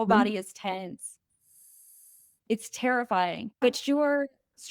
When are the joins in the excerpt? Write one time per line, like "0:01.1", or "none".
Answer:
0:03.6